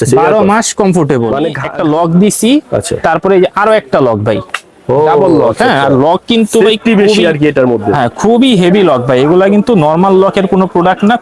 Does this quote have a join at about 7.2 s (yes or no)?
no